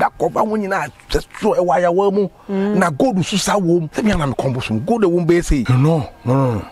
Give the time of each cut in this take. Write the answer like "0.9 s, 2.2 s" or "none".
3.9 s, 5.7 s